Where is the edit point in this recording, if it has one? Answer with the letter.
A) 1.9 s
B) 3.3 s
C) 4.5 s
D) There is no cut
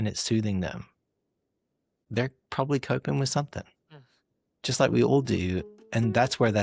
A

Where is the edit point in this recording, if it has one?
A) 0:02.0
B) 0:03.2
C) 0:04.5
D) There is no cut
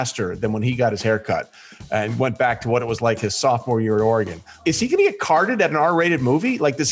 C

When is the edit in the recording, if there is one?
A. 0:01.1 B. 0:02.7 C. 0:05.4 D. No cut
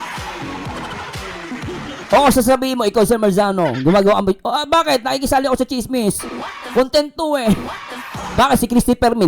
A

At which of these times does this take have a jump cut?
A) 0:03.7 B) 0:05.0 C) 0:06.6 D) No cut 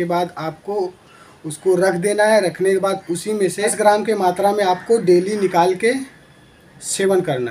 A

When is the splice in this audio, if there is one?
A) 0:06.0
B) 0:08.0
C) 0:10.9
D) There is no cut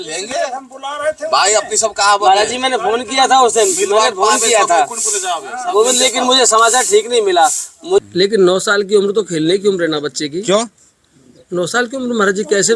B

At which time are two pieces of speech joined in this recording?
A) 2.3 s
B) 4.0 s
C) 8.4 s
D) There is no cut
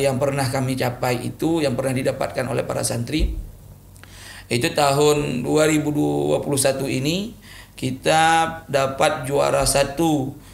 D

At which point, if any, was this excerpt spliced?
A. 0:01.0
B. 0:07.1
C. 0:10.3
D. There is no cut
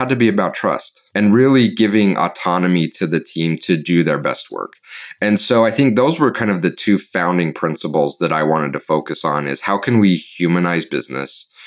A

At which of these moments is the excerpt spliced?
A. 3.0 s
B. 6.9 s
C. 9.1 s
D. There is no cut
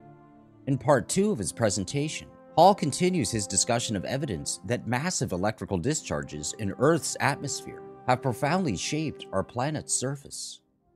B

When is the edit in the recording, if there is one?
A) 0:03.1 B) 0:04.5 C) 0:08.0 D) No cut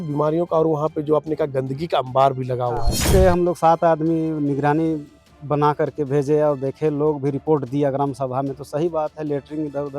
A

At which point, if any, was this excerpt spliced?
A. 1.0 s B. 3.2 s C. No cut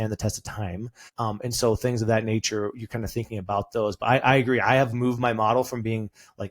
A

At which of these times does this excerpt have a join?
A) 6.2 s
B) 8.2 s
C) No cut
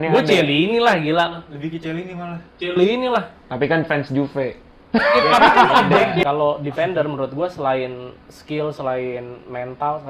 A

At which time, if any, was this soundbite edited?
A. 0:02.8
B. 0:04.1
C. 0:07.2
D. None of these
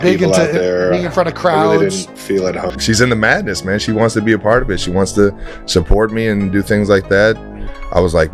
A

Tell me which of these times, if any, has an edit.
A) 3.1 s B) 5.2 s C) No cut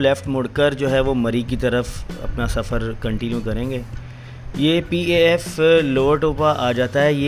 C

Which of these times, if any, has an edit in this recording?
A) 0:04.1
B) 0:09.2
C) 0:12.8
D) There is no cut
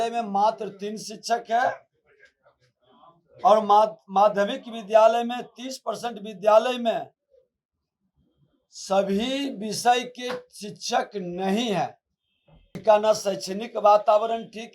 C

